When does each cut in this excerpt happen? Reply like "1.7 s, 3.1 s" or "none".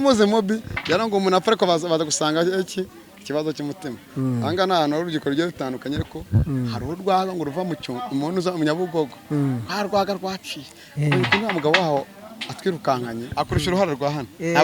13.3 s